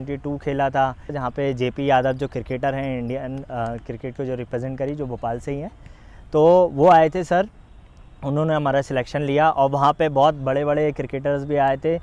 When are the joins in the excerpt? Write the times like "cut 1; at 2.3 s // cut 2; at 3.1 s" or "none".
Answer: none